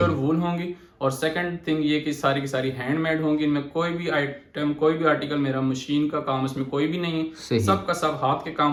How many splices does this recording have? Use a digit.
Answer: 0